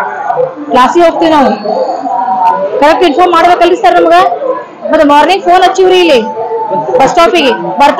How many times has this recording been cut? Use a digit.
0